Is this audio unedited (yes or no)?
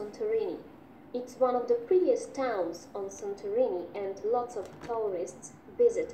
yes